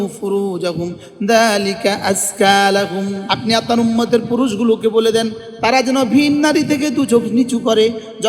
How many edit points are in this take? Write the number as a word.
one